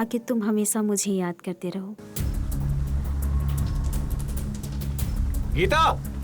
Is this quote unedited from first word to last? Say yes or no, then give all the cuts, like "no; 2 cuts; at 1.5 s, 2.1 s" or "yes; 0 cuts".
no; 1 cut; at 2.0 s